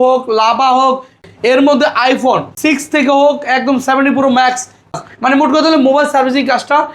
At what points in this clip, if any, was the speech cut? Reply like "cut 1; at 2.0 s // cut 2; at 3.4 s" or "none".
cut 1; at 1.2 s // cut 2; at 2.5 s // cut 3; at 4.9 s